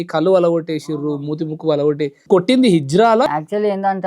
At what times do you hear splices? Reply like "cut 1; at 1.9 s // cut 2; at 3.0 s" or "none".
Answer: cut 1; at 2.2 s // cut 2; at 3.3 s